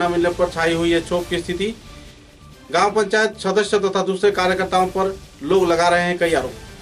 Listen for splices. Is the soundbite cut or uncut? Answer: uncut